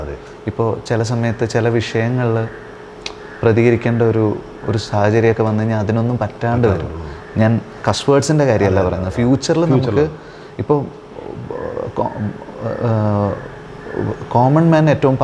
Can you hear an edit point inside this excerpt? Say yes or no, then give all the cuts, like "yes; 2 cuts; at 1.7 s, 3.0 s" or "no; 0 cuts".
no; 0 cuts